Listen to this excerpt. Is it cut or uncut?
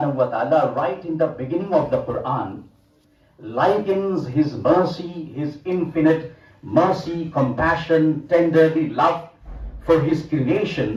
uncut